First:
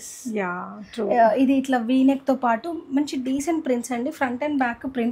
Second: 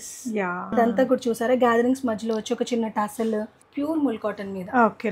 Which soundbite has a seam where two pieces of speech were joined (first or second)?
second